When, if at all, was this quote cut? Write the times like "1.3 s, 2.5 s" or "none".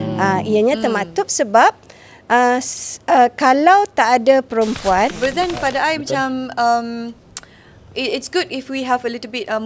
5.1 s